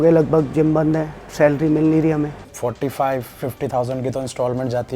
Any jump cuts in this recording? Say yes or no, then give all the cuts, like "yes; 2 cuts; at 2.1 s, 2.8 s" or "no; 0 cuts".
yes; 1 cut; at 2.4 s